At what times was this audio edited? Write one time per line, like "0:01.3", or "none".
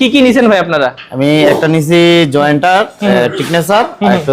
none